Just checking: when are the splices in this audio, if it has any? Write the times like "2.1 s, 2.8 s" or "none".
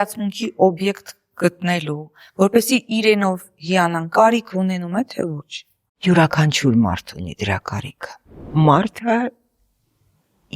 8.5 s